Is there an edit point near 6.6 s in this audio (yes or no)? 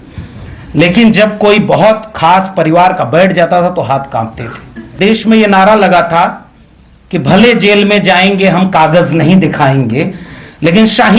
no